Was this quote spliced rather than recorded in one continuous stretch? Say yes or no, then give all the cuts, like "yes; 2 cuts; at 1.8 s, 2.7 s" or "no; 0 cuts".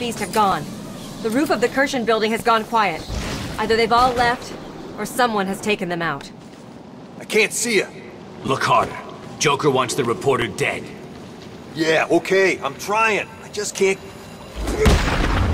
no; 0 cuts